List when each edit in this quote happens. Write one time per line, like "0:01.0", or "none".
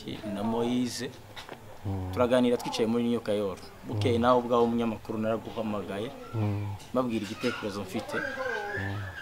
none

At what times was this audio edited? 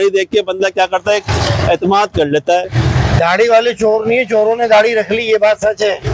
0:02.7

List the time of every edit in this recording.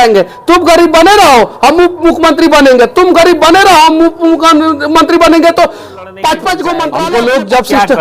0:06.9

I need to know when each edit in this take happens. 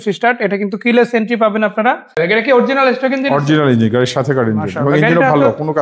0:02.2

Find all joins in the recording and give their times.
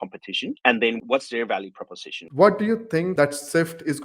0:02.2
0:03.1

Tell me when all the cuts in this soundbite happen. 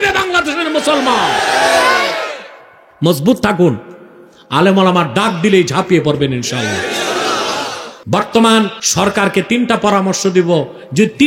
0:07.9
0:08.8

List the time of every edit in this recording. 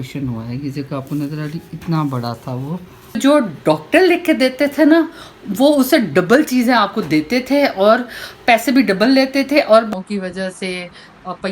0:03.2
0:09.9

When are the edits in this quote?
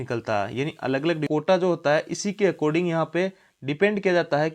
0:01.2

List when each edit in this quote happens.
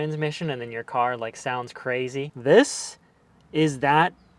0:02.3

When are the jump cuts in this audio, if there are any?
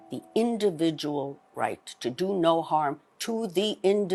none

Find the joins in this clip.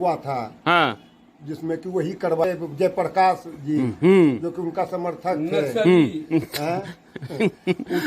0:02.4

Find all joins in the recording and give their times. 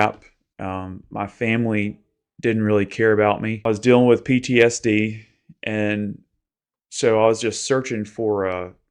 0:03.6

